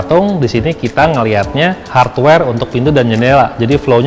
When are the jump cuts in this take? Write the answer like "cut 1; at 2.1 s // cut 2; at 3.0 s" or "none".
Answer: cut 1; at 1.8 s